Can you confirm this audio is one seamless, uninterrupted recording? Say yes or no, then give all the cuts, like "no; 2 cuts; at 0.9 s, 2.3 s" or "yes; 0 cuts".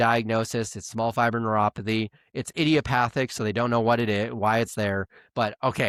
yes; 0 cuts